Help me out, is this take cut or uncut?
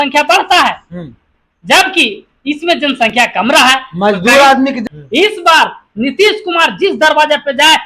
cut